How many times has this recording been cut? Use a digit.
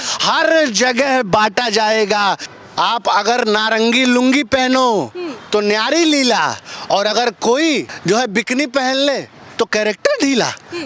2